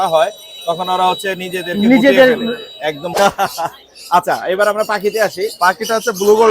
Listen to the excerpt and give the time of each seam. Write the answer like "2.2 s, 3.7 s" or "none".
3.1 s

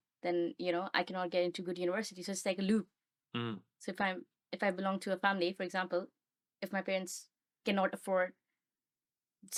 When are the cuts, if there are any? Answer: none

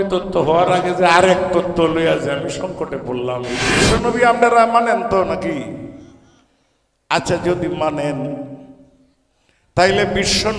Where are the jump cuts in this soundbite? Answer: 3.9 s

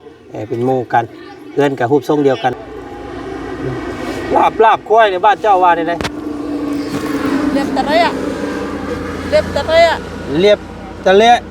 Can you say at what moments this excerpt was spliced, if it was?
2.5 s

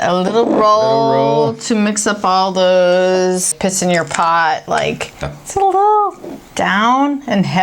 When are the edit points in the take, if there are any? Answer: 3.5 s, 5.2 s

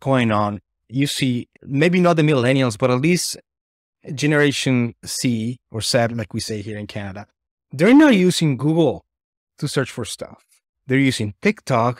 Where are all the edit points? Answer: 5.0 s

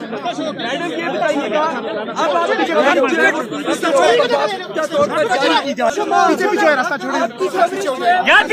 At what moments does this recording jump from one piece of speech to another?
5.9 s

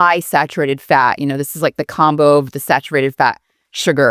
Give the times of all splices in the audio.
none

